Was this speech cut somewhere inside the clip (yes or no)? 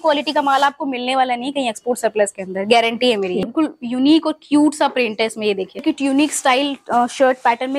yes